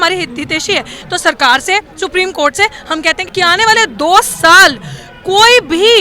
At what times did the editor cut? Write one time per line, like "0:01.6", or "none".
0:00.9
0:03.2